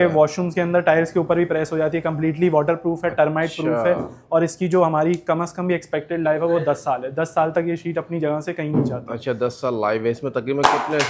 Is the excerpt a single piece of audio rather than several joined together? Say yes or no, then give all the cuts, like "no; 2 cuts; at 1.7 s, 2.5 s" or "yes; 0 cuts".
yes; 0 cuts